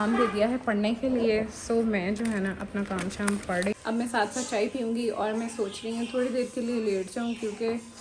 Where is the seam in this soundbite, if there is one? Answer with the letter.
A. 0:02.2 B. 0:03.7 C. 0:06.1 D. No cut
B